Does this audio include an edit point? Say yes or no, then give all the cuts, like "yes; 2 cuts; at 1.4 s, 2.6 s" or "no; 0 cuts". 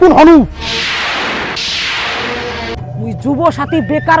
yes; 1 cut; at 2.8 s